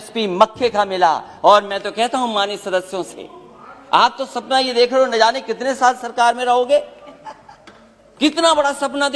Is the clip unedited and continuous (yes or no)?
yes